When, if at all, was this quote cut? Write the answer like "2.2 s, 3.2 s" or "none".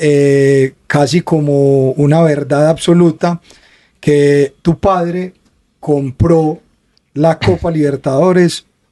none

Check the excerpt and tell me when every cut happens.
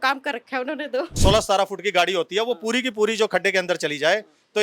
1.2 s

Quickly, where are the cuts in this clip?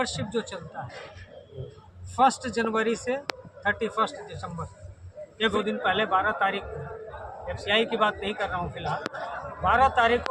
5.5 s

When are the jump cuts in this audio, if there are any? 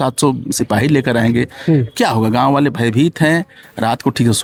none

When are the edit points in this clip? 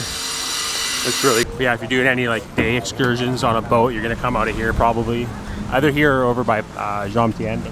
1.5 s

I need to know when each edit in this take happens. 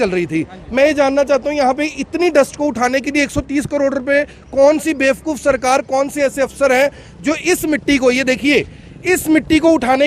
none

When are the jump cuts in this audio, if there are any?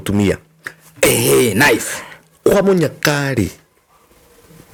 none

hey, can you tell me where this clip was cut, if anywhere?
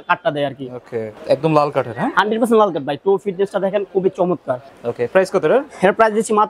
1.1 s, 4.7 s

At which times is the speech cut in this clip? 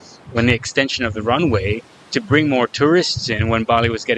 none

